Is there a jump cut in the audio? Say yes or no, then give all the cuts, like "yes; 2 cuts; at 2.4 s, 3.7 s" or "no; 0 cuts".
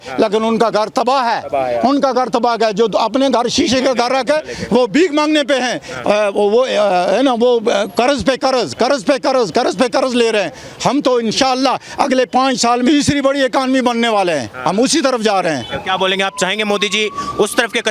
no; 0 cuts